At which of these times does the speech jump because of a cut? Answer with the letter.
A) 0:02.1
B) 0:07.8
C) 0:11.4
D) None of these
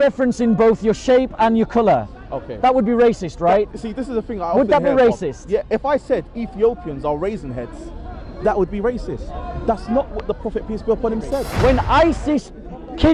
C